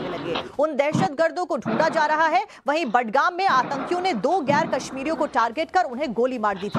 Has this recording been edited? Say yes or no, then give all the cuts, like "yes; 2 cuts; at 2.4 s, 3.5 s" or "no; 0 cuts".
yes; 1 cut; at 2.4 s